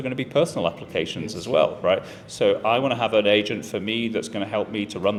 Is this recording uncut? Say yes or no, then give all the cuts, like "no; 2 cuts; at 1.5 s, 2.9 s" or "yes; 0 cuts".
yes; 0 cuts